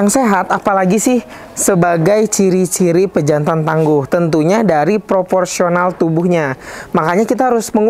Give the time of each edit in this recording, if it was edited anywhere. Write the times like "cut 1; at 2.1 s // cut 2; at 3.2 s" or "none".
none